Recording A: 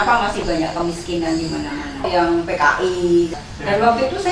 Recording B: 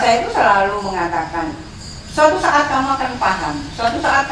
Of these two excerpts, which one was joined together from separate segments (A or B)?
A